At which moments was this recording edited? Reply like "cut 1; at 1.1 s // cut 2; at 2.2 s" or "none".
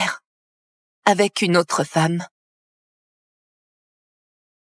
none